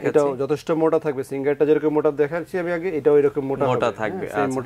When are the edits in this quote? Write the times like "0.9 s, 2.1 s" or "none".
none